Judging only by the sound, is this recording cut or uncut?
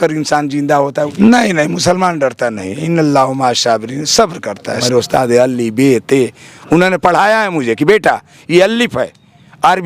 cut